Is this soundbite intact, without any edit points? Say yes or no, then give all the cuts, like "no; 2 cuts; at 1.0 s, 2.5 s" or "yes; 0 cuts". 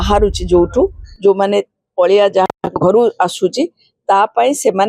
yes; 0 cuts